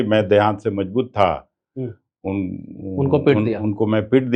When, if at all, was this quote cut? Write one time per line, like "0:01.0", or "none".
none